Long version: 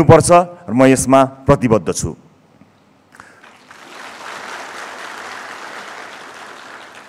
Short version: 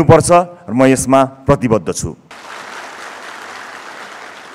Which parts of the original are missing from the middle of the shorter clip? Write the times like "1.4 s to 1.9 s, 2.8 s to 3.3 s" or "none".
2.3 s to 4.1 s